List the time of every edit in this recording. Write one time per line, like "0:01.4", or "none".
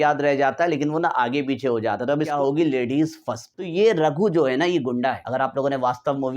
0:02.3
0:03.5
0:05.2